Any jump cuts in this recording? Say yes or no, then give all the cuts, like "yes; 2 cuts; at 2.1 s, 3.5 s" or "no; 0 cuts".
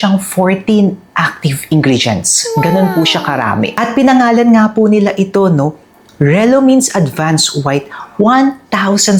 no; 0 cuts